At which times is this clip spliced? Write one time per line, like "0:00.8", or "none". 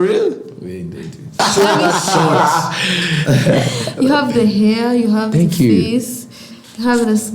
0:01.4